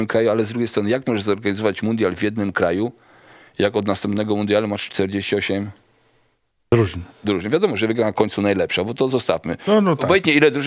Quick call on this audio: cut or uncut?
uncut